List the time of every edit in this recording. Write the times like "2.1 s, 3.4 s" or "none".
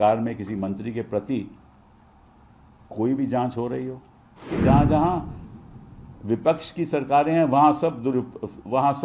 4.5 s

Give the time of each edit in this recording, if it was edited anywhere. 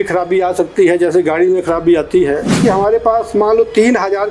2.5 s

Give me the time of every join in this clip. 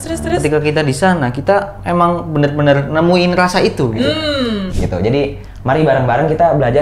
4.6 s

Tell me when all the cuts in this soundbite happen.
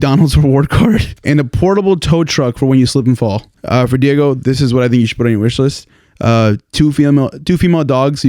1.1 s, 3.5 s

